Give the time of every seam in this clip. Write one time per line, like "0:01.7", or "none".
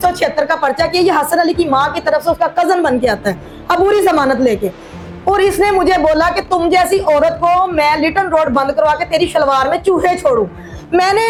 none